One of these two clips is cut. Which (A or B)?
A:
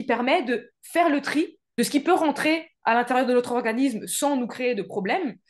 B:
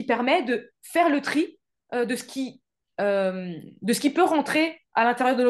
A